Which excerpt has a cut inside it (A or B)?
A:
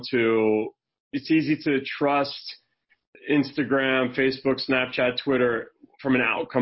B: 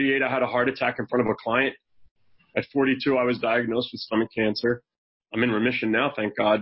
A